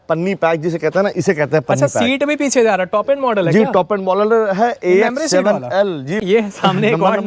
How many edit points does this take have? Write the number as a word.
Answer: one